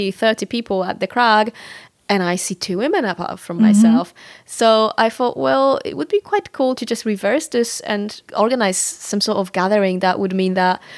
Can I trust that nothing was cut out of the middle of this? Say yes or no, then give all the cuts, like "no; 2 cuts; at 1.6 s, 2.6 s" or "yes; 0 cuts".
yes; 0 cuts